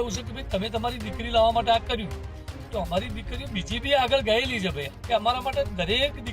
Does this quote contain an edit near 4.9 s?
yes; 1 cut; at 4.9 s

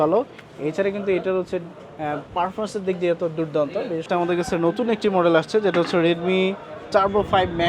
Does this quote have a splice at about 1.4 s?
no; 1 cut; at 4.1 s

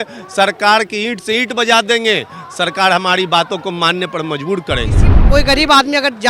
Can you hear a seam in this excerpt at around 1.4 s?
no; 1 cut; at 5.2 s

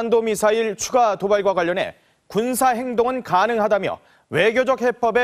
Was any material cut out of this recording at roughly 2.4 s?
yes; 1 cut; at 2.4 s

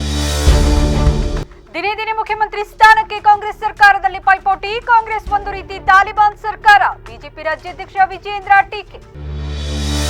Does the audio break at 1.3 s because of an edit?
yes; 1 cut; at 1.3 s

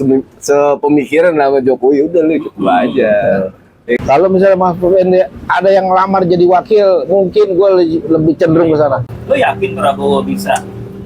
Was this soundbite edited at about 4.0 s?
yes; 2 cuts; at 4.0 s, 9.2 s

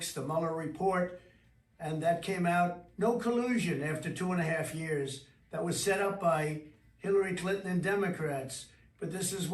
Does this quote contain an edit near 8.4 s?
yes; 1 cut; at 8.4 s

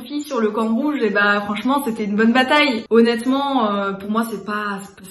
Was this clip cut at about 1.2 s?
no; 1 cut; at 2.8 s

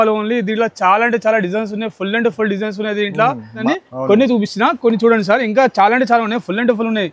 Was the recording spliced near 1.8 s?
no; 1 cut; at 3.6 s

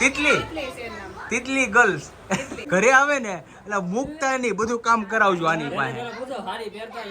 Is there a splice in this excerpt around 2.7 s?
yes; 1 cut; at 2.7 s

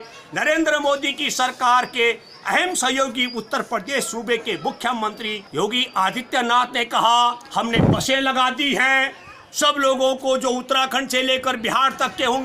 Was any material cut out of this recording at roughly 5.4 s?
yes; 1 cut; at 5.4 s

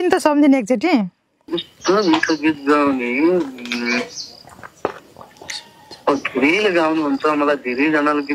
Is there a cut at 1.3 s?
no; 0 cuts

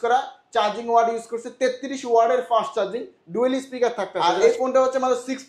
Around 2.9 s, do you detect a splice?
no; 1 cut; at 4.1 s

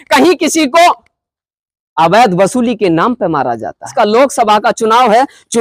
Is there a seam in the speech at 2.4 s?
no; 1 cut; at 3.9 s

